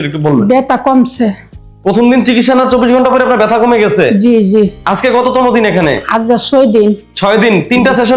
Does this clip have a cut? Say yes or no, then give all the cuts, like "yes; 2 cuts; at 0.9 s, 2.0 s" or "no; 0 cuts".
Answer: no; 0 cuts